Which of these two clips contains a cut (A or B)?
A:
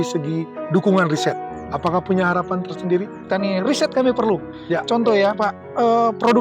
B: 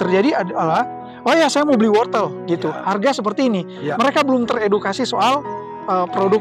A